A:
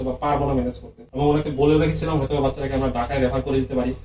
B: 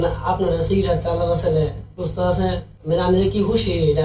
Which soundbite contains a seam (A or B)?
B